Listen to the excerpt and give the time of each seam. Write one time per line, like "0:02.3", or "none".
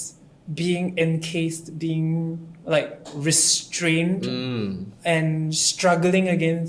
none